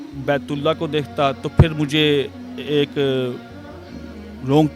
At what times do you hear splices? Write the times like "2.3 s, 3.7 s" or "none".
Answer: none